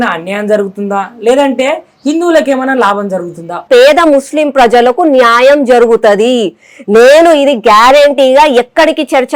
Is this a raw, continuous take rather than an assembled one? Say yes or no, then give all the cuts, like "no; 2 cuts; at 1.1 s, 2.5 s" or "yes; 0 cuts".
no; 1 cut; at 3.6 s